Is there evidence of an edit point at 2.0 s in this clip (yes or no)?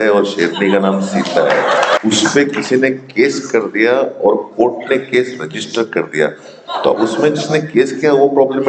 yes